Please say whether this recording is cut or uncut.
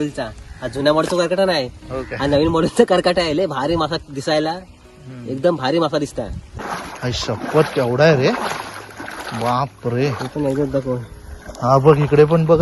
cut